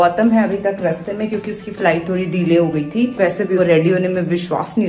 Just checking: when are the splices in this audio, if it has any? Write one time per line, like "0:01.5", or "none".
0:03.2